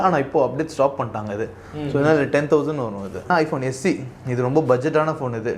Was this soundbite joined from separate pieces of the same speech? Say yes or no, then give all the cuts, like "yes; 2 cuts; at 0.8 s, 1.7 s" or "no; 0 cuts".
yes; 1 cut; at 3.3 s